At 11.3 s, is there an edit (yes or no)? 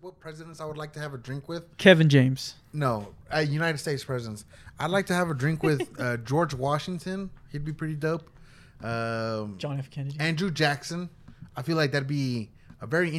no